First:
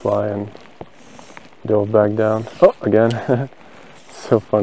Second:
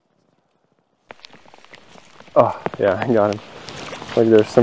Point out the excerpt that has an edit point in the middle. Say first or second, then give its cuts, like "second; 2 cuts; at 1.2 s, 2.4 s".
second; 1 cut; at 1.1 s